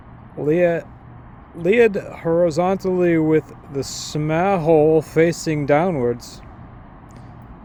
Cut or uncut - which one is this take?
uncut